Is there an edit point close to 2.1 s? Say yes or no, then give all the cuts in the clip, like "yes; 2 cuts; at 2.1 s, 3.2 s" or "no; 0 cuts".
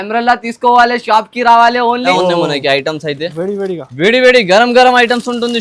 yes; 1 cut; at 2.1 s